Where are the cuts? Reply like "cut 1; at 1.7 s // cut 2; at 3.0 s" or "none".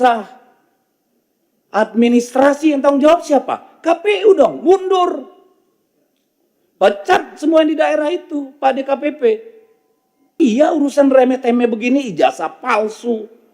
cut 1; at 10.3 s